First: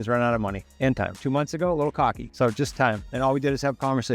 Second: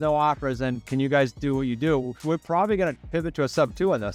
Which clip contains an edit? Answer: first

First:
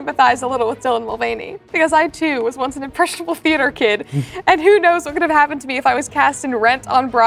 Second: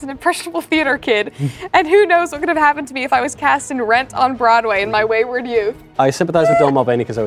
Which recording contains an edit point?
second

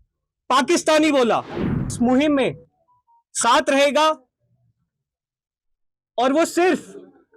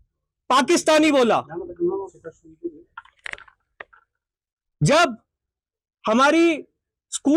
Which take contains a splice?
first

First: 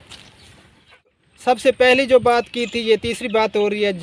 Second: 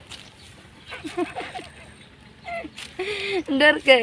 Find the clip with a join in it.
first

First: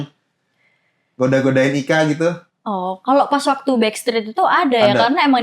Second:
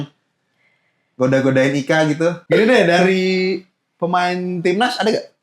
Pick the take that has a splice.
second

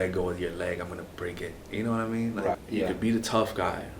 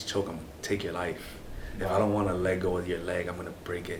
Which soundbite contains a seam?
first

